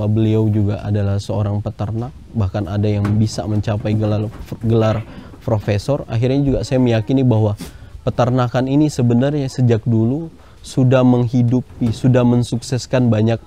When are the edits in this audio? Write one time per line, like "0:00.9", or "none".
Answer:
none